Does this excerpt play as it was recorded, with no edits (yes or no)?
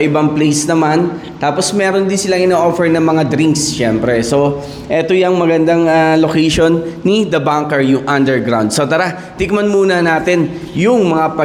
yes